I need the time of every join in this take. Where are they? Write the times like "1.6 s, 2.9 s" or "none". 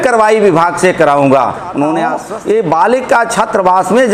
2.2 s